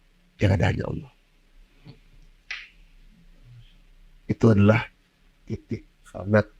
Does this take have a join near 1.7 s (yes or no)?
no